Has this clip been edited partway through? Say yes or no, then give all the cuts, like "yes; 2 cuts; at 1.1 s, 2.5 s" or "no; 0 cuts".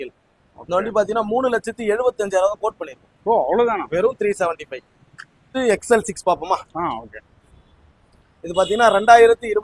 yes; 1 cut; at 5.4 s